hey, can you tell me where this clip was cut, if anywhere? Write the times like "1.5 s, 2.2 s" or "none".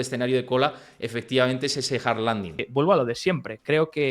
2.6 s